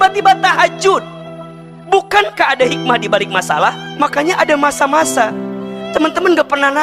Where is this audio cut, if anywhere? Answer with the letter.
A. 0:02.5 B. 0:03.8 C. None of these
B